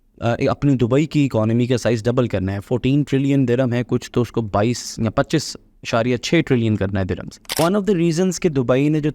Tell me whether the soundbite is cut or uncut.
cut